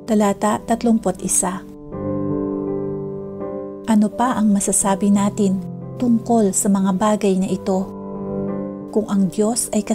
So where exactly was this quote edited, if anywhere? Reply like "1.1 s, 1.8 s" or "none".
none

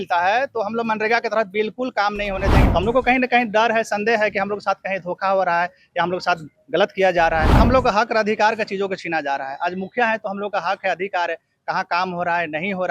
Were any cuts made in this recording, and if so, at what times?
2.6 s, 7.6 s

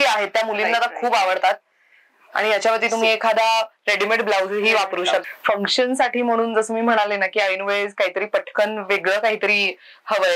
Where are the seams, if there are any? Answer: 5.2 s

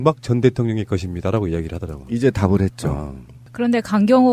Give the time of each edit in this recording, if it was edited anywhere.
none

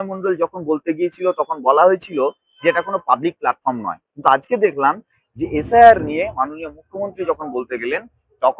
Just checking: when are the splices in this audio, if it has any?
none

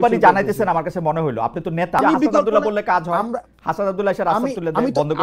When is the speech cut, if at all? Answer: 2.0 s

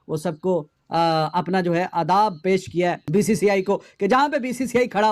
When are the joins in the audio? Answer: 3.0 s

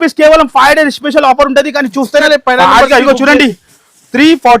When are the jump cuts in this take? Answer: 2.3 s

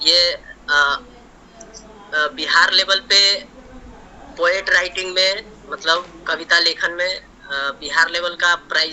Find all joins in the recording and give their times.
none

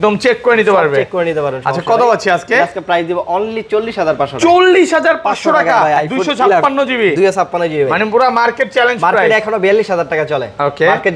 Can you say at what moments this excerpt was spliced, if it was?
none

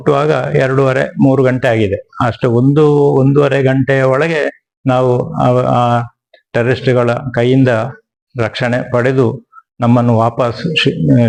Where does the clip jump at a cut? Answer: none

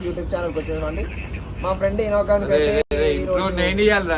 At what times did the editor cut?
none

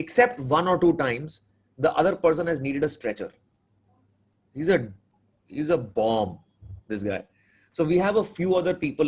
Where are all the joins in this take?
none

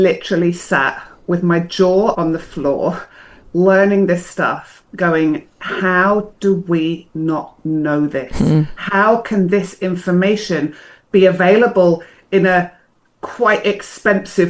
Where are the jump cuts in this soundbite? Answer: 2.2 s

